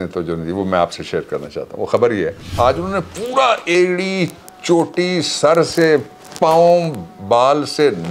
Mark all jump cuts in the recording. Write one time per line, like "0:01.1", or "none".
0:02.6